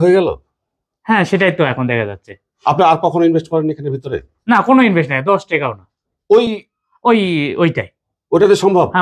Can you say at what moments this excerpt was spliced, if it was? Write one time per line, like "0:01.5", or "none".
none